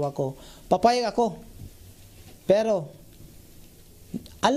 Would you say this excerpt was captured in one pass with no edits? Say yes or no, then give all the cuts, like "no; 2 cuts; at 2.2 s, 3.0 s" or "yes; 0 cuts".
yes; 0 cuts